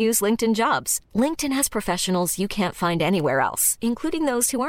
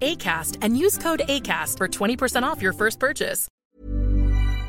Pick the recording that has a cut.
second; 1 cut; at 3.4 s

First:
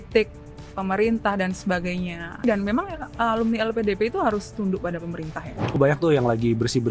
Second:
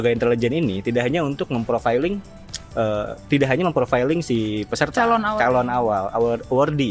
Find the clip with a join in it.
first; 2 cuts; at 2.4 s, 5.8 s

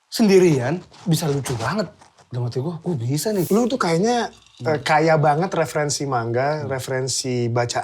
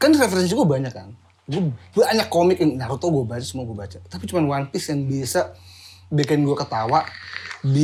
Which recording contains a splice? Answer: first; 1 cut; at 3.5 s

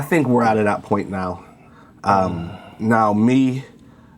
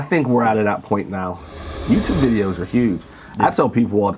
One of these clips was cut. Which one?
second; 1 cut; at 1.7 s

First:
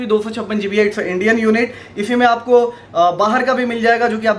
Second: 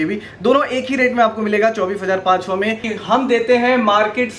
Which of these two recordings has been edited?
second; 1 cut; at 2.9 s

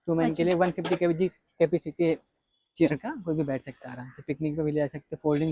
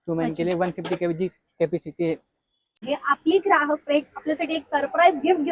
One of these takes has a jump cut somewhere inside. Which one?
second; 1 cut; at 2.8 s

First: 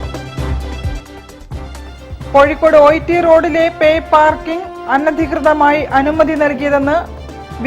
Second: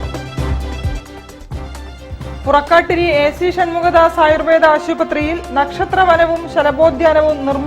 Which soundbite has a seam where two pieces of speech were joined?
second; 1 cut; at 1.8 s

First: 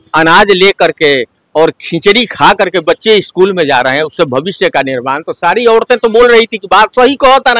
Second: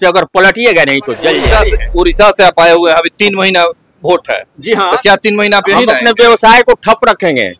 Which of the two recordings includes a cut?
second; 1 cut; at 1.5 s

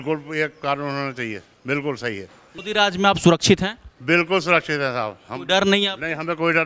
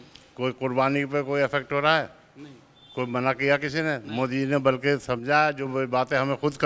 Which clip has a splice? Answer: first; 1 cut; at 2.5 s

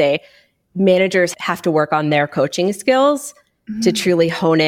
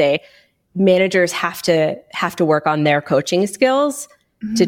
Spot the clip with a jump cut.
first; 1 cut; at 1.4 s

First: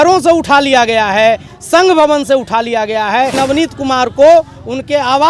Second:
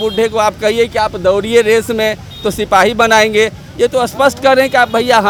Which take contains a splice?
first; 2 cuts; at 1.5 s, 3.3 s

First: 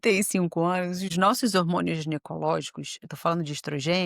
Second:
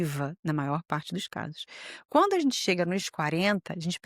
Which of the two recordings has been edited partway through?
first; 1 cut; at 1.1 s

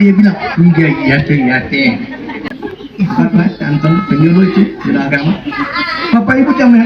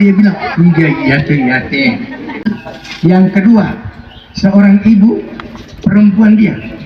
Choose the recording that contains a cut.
second; 1 cut; at 2.5 s

